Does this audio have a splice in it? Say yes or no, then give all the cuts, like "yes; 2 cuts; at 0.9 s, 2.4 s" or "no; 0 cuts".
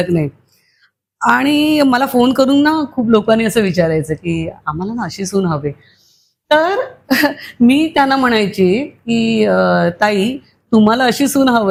no; 0 cuts